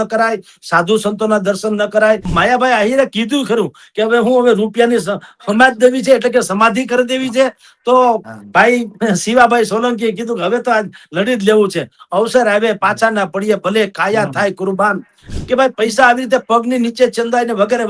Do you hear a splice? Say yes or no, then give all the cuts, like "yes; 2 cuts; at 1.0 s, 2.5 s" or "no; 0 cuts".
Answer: yes; 2 cuts; at 2.3 s, 15.3 s